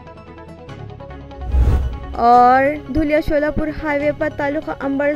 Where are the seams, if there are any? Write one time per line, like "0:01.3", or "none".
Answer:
0:01.9